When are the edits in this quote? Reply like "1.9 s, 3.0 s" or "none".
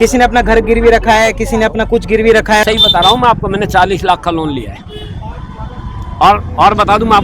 2.6 s